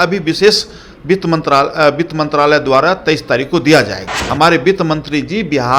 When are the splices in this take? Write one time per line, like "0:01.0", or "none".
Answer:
0:04.2

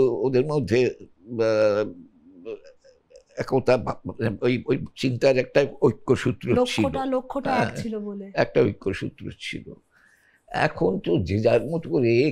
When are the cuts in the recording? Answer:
none

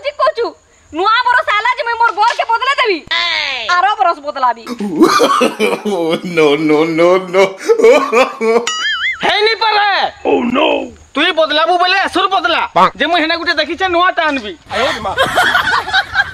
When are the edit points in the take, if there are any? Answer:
none

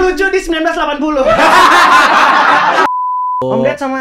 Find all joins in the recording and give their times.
0:02.9

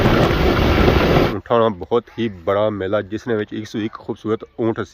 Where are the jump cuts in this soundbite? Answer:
0:01.3

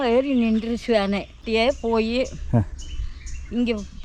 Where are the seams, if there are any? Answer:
0:01.4

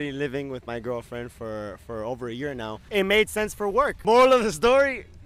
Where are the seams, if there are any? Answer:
0:04.0

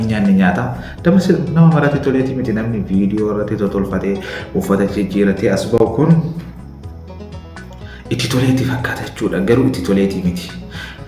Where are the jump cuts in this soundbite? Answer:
none

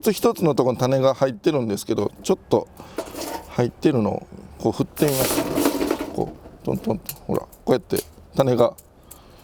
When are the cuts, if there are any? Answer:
none

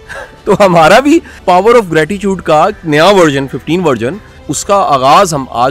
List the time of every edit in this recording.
0:01.4
0:04.5

